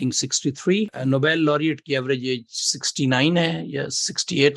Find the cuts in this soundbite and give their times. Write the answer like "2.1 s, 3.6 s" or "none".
1.0 s